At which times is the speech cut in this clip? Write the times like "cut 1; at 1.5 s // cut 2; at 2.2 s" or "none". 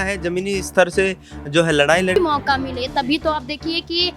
cut 1; at 2.2 s